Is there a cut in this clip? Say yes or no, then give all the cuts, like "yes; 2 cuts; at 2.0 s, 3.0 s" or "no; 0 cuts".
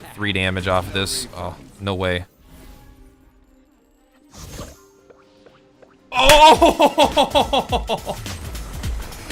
no; 0 cuts